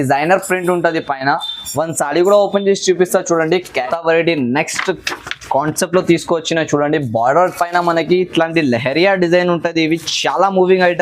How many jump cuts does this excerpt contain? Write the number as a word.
one